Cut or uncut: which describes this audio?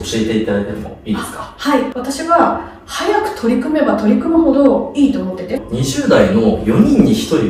cut